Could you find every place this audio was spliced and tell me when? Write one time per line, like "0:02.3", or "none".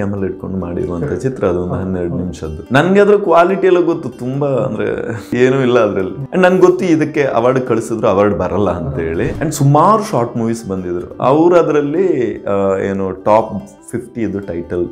0:02.6
0:05.3
0:06.2
0:09.3